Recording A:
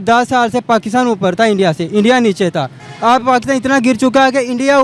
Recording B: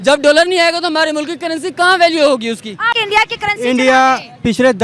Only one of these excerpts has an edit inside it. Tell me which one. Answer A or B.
B